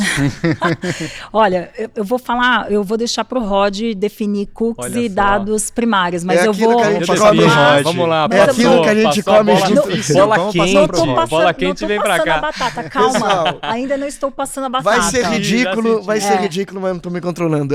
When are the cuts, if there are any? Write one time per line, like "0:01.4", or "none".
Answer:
none